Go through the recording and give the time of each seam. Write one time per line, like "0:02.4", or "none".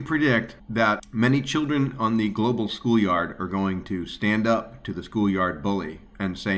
none